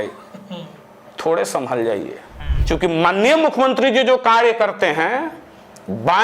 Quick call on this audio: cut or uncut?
cut